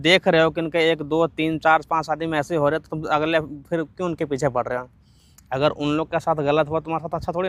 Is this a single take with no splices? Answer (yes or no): yes